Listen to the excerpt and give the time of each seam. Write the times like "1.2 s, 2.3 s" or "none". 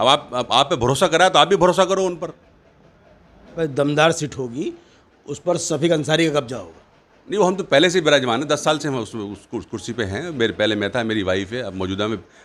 3.6 s